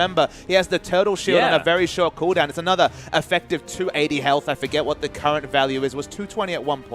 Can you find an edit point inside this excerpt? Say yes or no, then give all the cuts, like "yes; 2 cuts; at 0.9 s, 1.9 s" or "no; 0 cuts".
no; 0 cuts